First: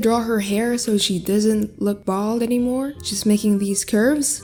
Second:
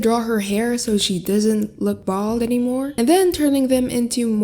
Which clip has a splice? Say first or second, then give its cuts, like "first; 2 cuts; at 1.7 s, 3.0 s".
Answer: second; 1 cut; at 2.9 s